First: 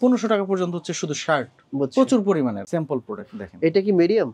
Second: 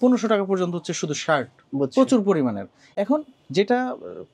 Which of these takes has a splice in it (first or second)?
first